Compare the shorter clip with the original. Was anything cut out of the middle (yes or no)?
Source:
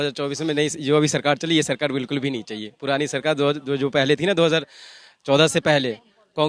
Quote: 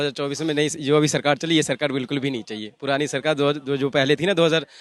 no